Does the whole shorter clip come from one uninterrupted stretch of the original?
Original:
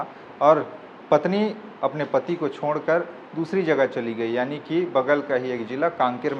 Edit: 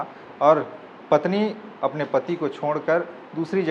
yes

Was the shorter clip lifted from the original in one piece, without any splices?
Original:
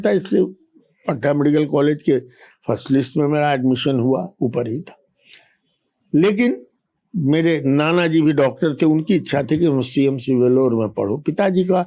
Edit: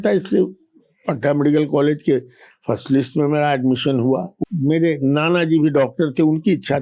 no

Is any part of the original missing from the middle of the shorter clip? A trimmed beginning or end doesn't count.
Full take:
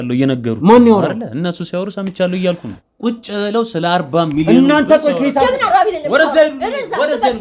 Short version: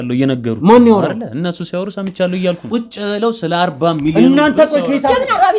yes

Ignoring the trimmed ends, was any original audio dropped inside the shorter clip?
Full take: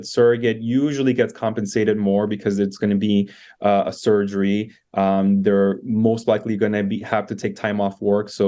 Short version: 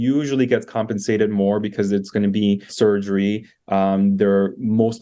yes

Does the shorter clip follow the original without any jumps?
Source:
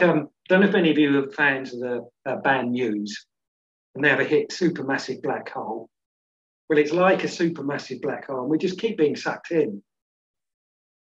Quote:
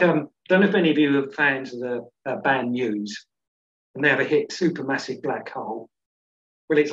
yes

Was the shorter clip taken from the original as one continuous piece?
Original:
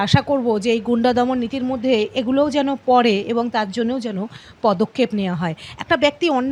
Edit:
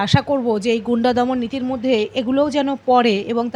yes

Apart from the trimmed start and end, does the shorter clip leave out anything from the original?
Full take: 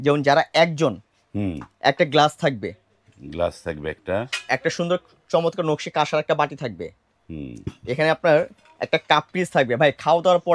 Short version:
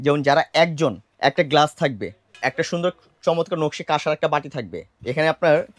yes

